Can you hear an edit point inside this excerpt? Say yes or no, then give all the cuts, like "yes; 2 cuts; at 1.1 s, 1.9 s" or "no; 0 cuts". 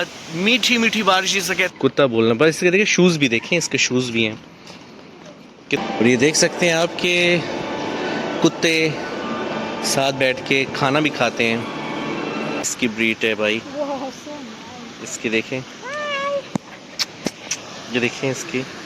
yes; 3 cuts; at 1.7 s, 5.8 s, 12.7 s